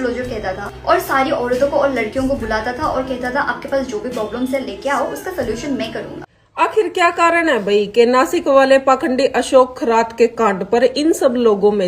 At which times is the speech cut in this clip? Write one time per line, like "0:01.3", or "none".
0:06.3